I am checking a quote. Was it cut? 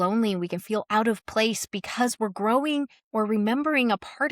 yes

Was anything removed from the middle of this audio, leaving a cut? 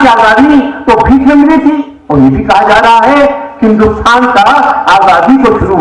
yes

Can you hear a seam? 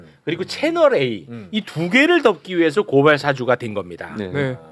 no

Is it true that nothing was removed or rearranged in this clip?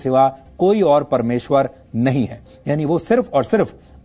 yes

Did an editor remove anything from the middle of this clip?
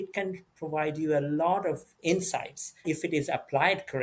yes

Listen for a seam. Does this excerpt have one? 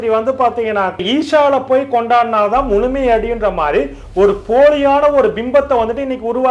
yes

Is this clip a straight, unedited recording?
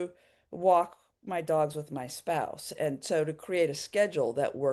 yes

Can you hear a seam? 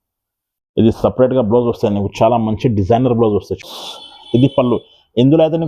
yes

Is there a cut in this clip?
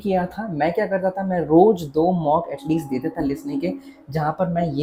no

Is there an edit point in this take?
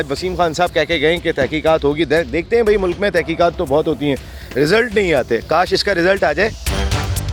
no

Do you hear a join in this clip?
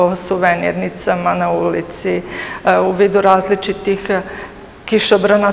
no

